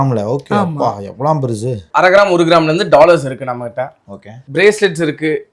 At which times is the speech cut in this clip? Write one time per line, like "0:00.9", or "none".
0:01.9

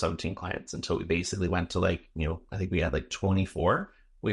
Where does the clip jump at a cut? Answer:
none

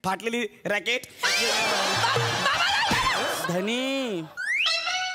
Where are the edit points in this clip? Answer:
0:03.4

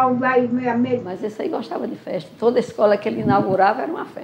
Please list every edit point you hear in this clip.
0:01.2

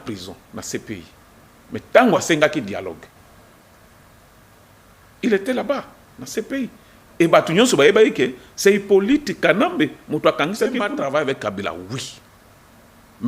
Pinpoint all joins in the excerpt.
0:10.9

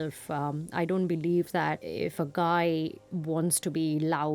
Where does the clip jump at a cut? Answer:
0:01.9

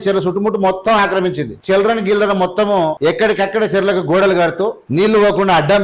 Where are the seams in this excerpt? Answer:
0:01.5
0:03.0
0:04.8

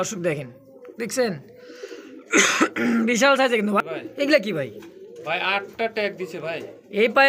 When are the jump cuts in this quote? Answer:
0:03.8

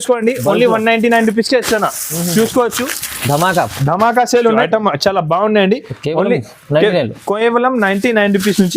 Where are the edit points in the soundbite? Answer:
0:04.6

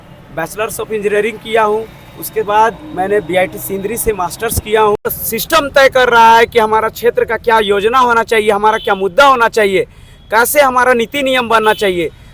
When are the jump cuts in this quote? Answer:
0:05.2

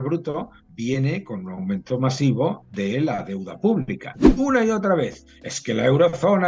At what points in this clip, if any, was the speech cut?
0:04.2

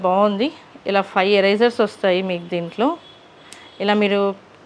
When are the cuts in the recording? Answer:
none

